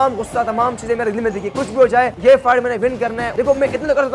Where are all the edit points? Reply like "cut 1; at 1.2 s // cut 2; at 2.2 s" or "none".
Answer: cut 1; at 2.1 s // cut 2; at 3.2 s